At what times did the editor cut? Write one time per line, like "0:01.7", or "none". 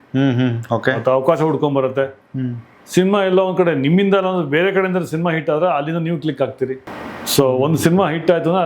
0:06.9